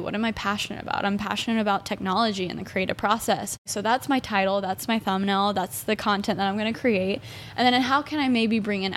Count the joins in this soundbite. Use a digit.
1